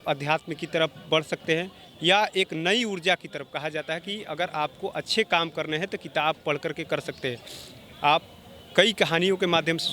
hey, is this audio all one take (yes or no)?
yes